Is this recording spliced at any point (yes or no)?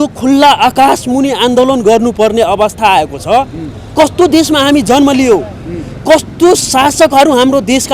no